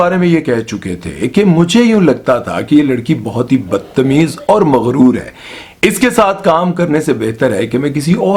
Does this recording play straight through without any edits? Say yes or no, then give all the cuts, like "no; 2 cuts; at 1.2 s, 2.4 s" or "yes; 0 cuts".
yes; 0 cuts